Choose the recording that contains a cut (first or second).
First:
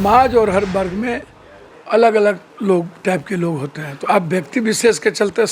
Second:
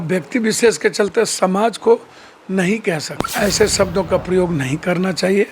second